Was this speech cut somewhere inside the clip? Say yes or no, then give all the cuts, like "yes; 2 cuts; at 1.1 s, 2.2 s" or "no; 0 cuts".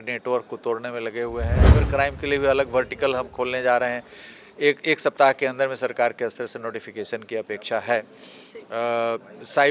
yes; 1 cut; at 1.7 s